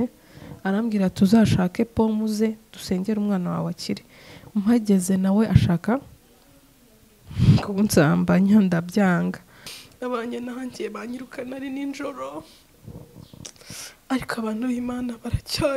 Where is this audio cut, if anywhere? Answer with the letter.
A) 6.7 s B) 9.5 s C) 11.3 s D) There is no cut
B